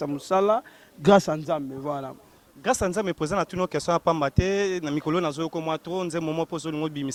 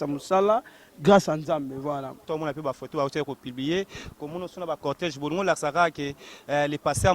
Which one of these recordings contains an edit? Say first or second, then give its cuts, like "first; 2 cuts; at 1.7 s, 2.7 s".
second; 1 cut; at 2.2 s